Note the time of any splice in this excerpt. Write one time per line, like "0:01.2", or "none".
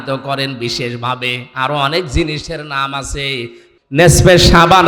0:03.7